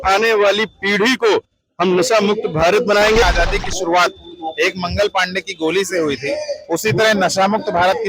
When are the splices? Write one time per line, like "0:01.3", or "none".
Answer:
0:03.2